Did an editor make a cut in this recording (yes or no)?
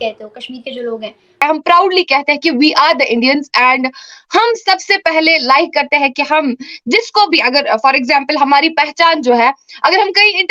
yes